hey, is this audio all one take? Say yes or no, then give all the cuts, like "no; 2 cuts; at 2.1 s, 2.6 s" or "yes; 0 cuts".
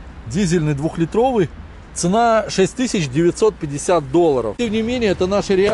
no; 1 cut; at 4.6 s